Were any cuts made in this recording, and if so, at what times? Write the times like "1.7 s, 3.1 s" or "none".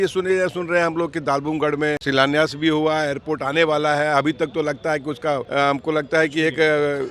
2.0 s, 5.5 s